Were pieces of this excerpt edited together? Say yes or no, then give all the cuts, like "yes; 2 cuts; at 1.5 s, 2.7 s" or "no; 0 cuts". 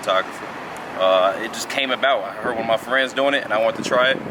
no; 0 cuts